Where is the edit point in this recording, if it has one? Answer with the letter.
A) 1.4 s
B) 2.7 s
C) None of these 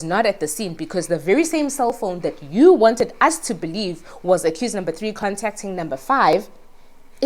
C